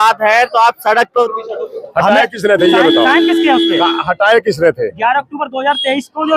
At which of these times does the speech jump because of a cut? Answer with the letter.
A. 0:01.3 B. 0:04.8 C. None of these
A